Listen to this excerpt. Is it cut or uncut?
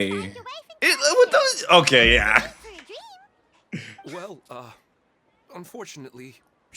uncut